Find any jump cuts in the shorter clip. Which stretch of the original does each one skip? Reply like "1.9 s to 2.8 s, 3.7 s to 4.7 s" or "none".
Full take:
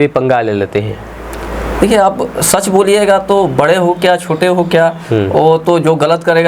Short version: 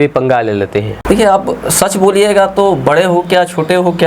1.0 s to 1.7 s